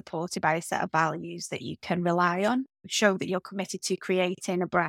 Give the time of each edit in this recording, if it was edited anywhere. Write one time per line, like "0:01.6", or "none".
0:02.9

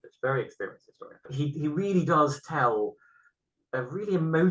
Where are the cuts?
0:01.3

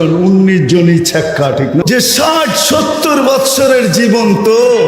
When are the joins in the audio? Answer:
0:01.8

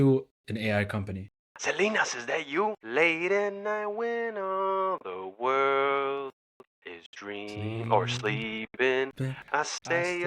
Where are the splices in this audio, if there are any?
0:01.5
0:02.8

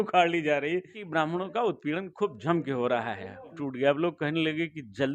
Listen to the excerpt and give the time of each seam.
0:01.0
0:03.6

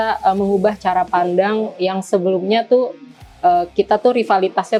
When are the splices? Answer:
none

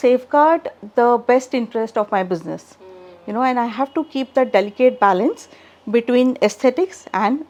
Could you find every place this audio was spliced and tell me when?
none

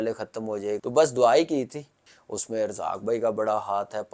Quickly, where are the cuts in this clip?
0:00.8
0:02.0

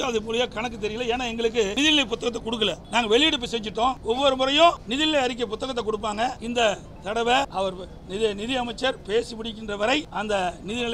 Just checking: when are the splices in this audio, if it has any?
0:01.7
0:02.8
0:04.0
0:04.8
0:06.4
0:07.5
0:10.1

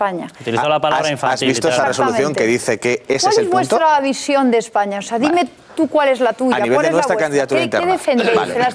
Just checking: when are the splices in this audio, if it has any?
none

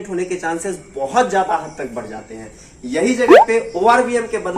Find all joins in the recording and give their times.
none

